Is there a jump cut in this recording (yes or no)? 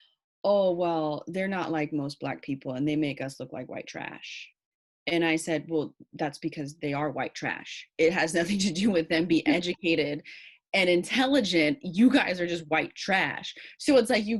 no